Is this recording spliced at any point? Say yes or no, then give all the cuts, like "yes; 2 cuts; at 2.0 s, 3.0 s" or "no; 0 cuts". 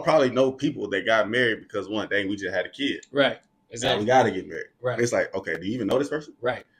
no; 0 cuts